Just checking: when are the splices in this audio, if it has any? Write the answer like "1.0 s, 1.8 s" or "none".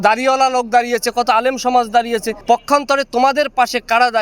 2.3 s